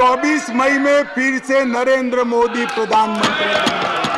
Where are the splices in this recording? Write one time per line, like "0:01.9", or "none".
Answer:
none